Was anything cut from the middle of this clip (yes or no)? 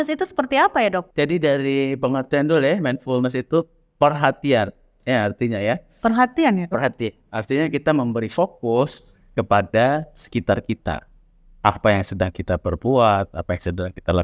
yes